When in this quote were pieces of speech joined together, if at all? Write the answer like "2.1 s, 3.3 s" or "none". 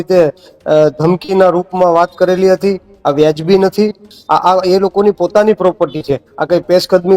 4.1 s